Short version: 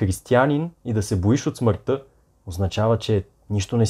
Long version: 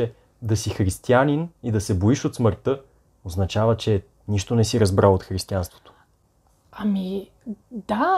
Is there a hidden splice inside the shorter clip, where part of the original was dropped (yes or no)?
no